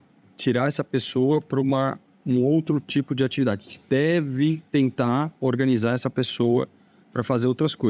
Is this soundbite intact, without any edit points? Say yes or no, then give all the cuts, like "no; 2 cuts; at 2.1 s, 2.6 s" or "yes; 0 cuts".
yes; 0 cuts